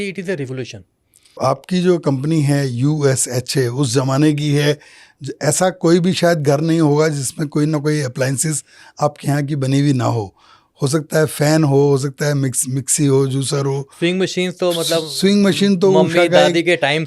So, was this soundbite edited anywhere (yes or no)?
yes